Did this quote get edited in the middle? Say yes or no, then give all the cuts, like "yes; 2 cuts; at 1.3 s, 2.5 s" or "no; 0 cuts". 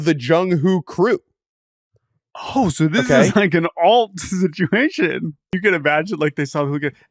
yes; 1 cut; at 5.5 s